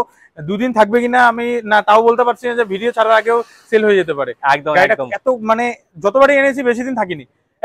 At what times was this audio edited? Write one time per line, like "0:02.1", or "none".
none

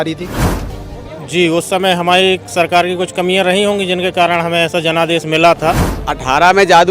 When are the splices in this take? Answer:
0:05.9

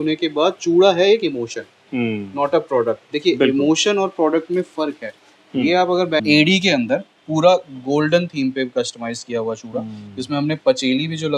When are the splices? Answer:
0:06.2

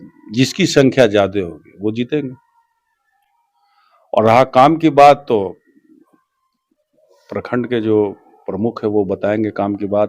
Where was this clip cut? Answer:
none

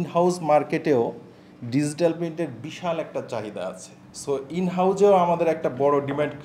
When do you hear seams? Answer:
none

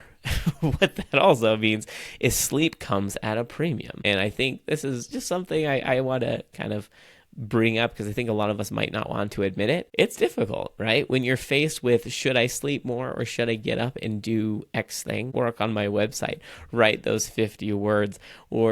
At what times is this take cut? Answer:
0:03.9
0:09.9
0:15.3

